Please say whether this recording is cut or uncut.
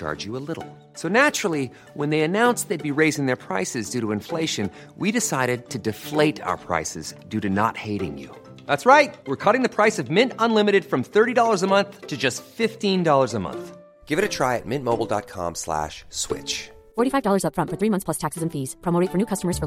uncut